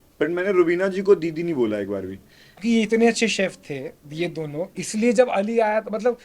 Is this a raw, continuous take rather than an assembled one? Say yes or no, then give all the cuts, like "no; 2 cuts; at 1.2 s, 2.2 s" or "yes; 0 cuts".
no; 1 cut; at 2.5 s